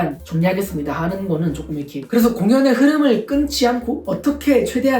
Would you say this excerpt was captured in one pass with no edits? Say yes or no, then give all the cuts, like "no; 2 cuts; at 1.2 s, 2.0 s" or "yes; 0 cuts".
no; 1 cut; at 2.0 s